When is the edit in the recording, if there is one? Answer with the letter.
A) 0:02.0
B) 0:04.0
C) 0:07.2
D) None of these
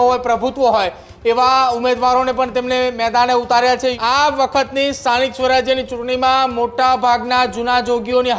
B